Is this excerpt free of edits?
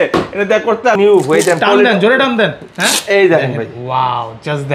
no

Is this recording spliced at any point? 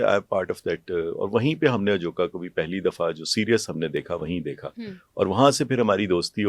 no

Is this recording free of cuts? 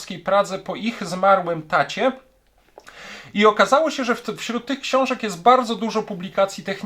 yes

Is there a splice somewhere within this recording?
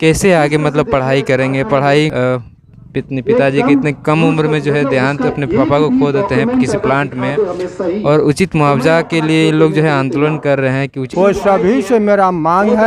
yes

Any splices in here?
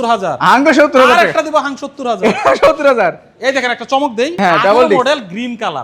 no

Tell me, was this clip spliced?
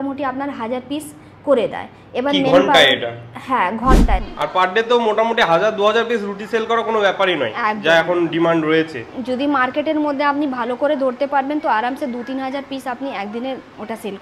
yes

